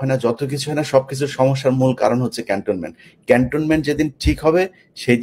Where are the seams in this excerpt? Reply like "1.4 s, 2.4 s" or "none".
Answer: none